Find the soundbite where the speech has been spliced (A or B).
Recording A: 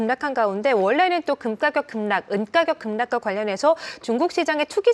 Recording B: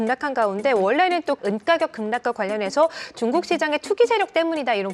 B